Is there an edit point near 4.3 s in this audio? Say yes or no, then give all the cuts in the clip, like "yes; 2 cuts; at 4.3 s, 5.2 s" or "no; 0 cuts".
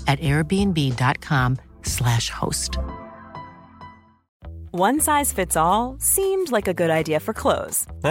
yes; 1 cut; at 4.3 s